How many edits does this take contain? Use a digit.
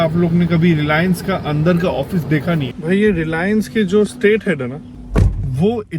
2